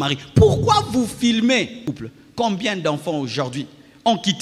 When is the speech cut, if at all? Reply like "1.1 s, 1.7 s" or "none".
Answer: 1.8 s